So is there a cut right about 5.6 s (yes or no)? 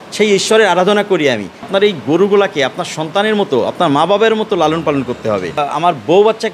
yes